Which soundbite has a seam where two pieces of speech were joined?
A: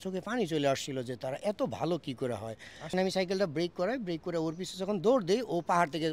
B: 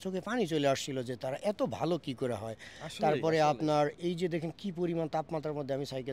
A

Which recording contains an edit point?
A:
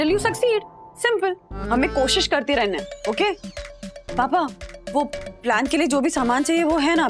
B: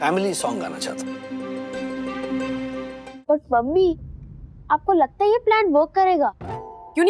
B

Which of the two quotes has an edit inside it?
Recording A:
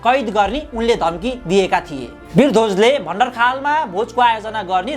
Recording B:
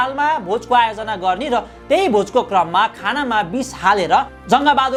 A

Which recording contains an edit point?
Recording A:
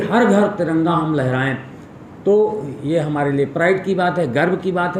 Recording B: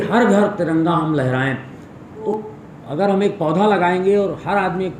B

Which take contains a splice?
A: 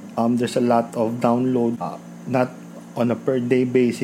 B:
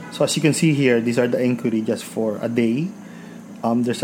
A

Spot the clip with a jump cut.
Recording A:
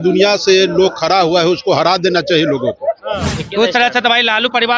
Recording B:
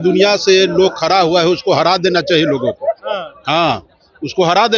A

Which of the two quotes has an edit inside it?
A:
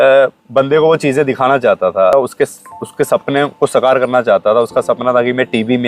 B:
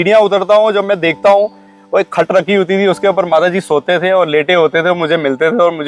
A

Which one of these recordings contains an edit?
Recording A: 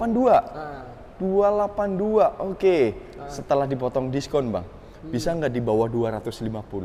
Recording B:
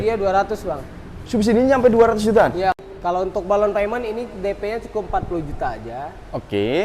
B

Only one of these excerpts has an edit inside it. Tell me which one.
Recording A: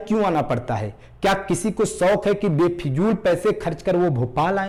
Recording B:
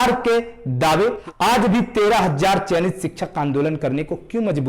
B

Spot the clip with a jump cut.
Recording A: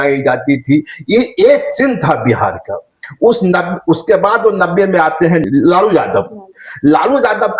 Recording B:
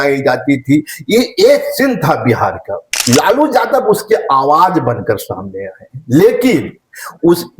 B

